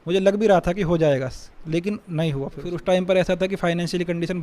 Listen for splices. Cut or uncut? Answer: cut